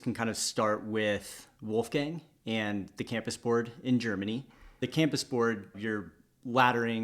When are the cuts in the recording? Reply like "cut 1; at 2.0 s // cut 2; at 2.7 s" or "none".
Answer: cut 1; at 4.8 s // cut 2; at 5.7 s